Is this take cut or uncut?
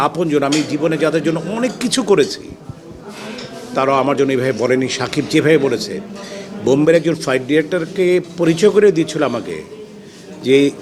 uncut